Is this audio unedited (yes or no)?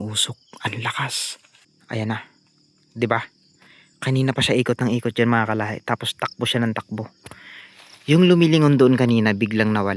no